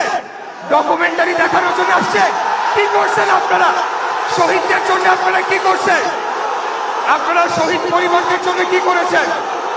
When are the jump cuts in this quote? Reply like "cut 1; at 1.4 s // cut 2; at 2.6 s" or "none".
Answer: none